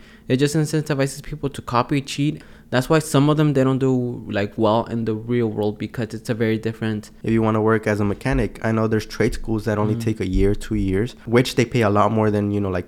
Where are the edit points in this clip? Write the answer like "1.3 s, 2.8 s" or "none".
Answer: 2.4 s, 7.1 s, 11.2 s